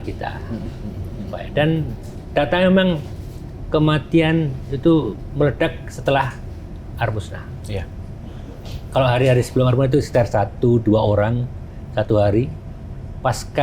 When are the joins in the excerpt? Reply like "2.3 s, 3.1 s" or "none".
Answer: none